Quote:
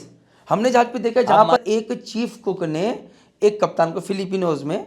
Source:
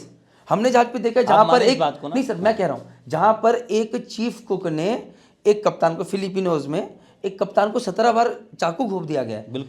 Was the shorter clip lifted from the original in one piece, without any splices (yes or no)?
no